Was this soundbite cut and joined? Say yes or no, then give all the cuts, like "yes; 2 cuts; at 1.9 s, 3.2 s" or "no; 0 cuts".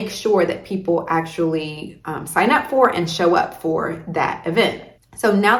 no; 0 cuts